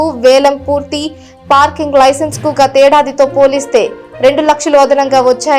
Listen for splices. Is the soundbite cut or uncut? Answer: uncut